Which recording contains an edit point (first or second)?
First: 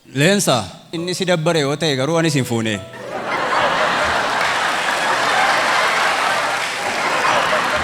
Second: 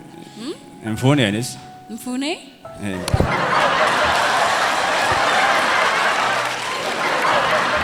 first